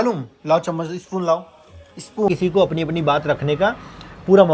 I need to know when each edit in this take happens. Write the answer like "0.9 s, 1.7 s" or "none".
2.3 s